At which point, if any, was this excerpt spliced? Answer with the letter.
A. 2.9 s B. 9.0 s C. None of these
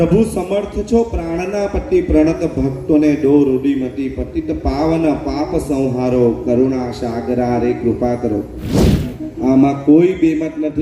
B